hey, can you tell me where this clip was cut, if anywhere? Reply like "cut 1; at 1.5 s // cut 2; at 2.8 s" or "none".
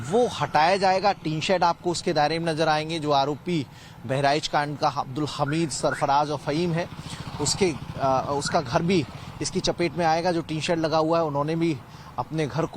cut 1; at 10.5 s

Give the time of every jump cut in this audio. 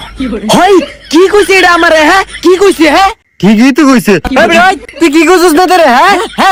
none

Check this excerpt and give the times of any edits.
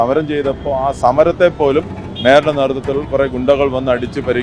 none

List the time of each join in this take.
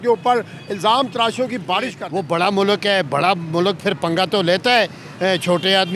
cut 1; at 2.0 s

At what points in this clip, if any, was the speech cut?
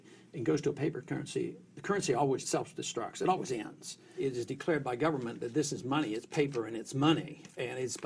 cut 1; at 2.4 s // cut 2; at 4.1 s

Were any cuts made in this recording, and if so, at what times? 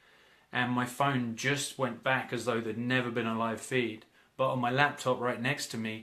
none

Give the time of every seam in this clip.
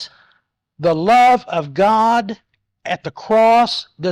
none

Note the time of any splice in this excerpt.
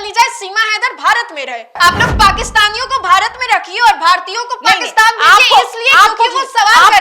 cut 1; at 1.8 s

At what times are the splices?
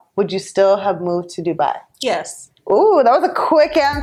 none

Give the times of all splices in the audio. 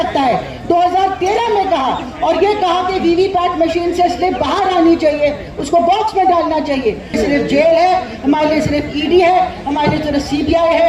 cut 1; at 7.1 s

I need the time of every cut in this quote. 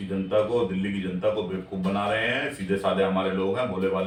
none

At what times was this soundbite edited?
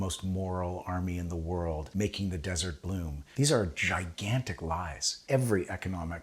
cut 1; at 1.9 s // cut 2; at 3.2 s // cut 3; at 5.2 s

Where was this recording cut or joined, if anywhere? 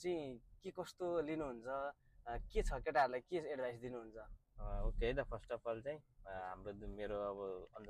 none

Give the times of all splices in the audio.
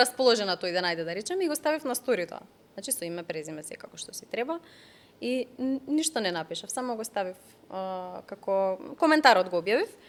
none

